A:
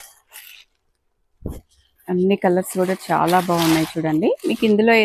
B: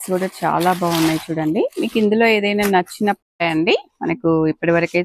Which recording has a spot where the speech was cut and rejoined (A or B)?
B